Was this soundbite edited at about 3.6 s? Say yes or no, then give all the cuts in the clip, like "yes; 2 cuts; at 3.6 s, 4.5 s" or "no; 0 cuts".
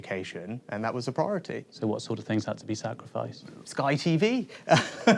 yes; 1 cut; at 3.6 s